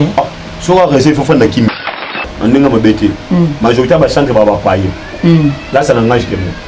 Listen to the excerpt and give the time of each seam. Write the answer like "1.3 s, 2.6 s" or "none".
2.3 s